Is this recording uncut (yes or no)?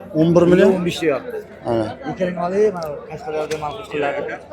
yes